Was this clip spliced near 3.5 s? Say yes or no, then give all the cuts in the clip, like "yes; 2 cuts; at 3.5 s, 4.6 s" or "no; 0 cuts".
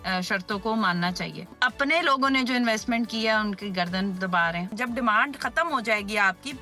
no; 2 cuts; at 1.6 s, 4.7 s